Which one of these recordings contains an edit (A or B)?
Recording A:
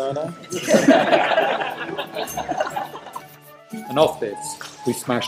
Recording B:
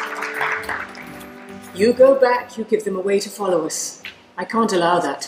B